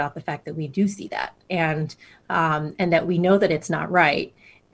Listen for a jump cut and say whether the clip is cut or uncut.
uncut